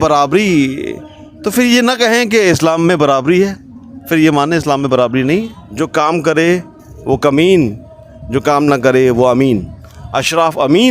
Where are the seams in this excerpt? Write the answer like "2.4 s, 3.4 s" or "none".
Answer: 5.6 s